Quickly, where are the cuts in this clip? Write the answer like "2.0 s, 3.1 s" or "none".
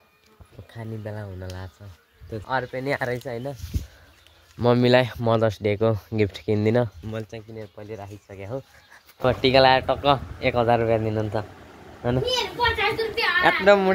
2.4 s, 9.2 s